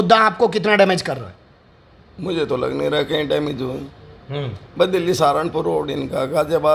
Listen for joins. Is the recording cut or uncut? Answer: uncut